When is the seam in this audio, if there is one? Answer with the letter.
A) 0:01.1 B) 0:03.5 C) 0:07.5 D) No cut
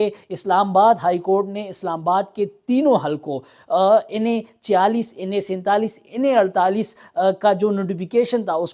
D